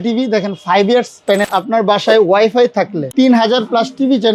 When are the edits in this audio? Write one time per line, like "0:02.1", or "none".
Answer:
0:01.4
0:03.0